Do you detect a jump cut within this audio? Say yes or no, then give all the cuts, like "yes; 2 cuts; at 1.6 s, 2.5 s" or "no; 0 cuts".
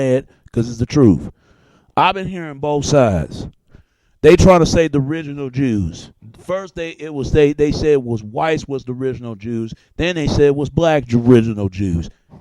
yes; 1 cut; at 10.8 s